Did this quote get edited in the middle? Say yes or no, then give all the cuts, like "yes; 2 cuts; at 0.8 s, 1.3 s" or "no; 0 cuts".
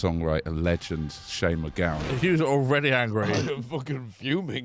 yes; 1 cut; at 2.1 s